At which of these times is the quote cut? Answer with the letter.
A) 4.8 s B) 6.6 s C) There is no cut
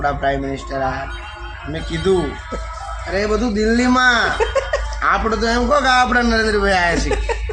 C